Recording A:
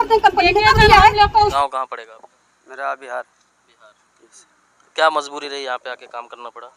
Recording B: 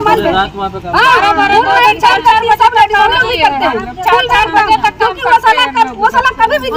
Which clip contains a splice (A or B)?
A